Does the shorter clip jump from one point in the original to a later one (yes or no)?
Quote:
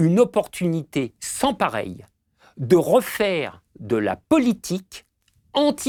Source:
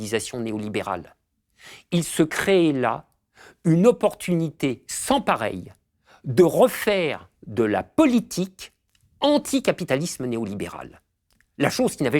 no